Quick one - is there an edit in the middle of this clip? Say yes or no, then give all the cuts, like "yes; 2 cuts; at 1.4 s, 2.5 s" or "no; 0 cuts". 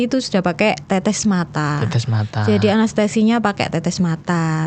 no; 0 cuts